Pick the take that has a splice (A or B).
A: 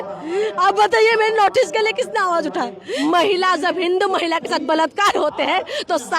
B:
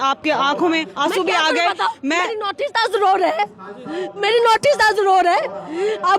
A